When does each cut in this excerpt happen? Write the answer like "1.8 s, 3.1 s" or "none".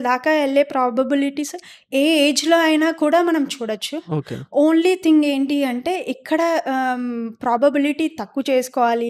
none